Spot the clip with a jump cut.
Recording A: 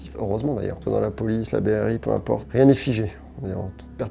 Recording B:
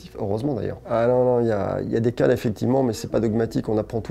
A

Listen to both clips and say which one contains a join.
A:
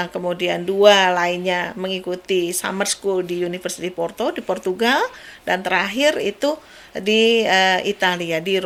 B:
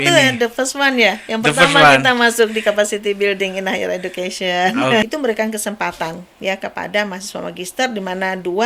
B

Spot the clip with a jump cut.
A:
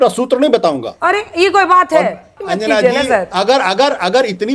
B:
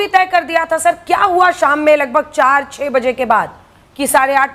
A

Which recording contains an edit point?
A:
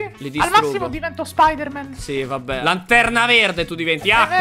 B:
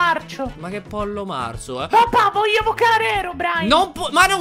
A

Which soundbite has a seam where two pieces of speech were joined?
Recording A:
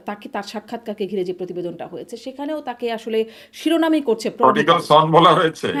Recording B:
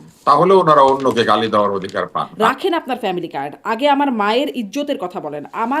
B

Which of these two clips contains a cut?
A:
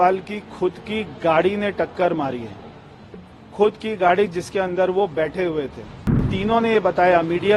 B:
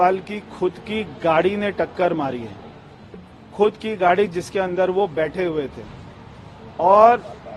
A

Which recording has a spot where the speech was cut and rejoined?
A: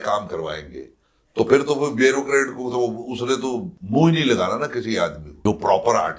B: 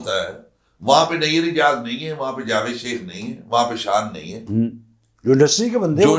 A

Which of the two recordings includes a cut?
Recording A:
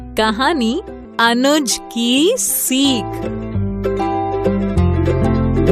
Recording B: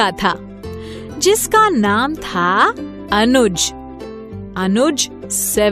A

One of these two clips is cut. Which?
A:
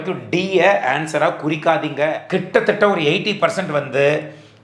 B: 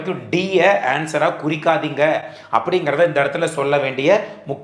A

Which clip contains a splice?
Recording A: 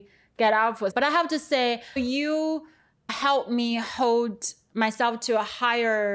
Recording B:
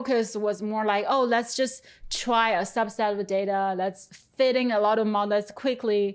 A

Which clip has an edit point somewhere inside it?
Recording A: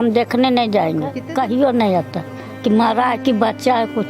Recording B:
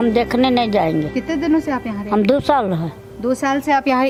A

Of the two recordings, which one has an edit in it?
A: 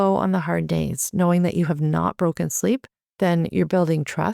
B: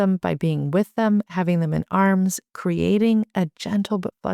A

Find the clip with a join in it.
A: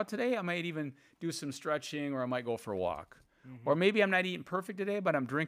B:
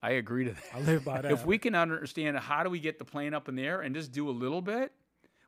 B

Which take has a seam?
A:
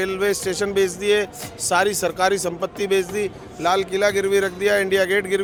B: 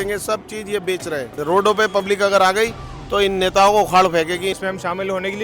B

